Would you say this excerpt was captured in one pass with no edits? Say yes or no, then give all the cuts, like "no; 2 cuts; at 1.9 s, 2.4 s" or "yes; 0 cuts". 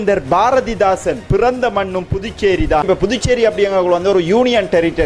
no; 1 cut; at 2.8 s